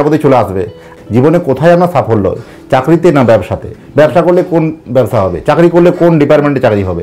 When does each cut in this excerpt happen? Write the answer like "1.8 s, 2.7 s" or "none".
0.9 s